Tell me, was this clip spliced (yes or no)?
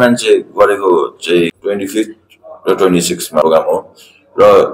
yes